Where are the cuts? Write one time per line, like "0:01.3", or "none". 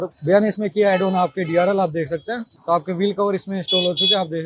0:02.5